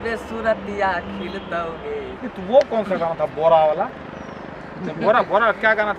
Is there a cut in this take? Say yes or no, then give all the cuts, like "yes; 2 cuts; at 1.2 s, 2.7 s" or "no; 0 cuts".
yes; 1 cut; at 2.2 s